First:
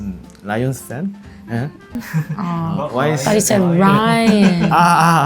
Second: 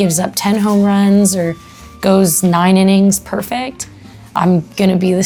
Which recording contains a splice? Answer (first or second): first